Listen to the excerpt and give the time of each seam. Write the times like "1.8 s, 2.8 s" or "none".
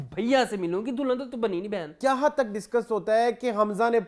1.8 s